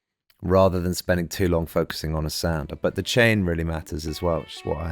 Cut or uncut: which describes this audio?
cut